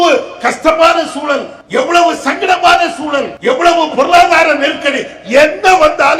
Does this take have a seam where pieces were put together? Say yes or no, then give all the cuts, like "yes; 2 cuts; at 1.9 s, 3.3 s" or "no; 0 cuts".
yes; 2 cuts; at 1.5 s, 3.3 s